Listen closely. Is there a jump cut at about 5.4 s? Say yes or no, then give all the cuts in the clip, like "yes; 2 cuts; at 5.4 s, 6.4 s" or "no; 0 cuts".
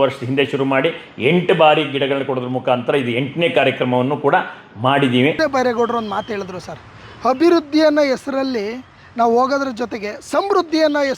yes; 1 cut; at 5.4 s